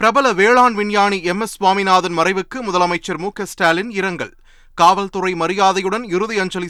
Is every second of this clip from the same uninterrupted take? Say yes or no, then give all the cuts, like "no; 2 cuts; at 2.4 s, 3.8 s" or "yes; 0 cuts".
yes; 0 cuts